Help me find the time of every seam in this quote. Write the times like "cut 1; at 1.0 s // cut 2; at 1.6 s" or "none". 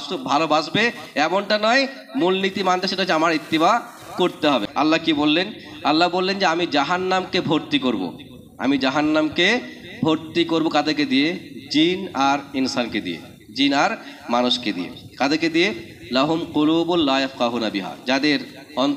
cut 1; at 4.7 s